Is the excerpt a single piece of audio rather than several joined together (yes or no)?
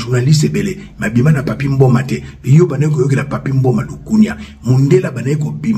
yes